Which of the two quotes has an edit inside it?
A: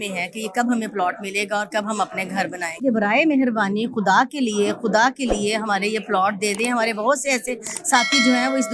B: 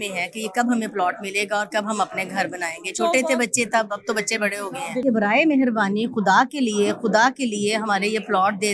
A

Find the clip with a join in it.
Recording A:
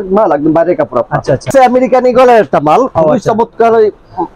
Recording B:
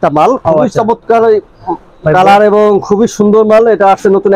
A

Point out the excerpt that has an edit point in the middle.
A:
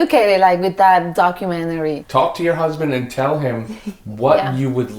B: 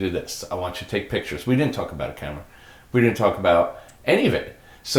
A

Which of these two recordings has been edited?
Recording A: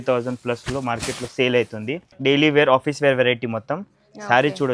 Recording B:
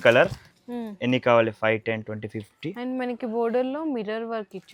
A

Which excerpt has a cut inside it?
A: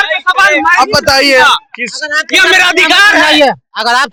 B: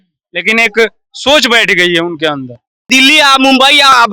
B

